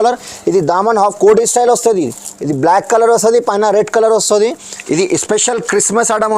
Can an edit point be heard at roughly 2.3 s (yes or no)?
no